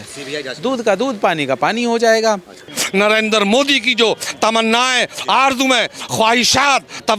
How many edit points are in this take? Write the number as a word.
one